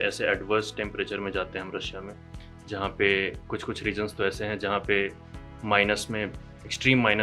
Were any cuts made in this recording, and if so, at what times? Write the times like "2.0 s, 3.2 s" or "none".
none